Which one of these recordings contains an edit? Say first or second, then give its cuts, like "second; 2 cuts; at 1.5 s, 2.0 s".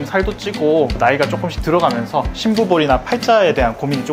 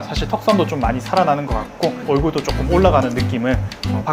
first; 1 cut; at 0.9 s